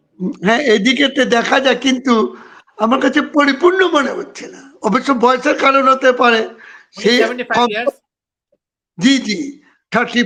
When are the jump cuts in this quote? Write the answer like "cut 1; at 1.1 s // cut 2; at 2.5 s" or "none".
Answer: none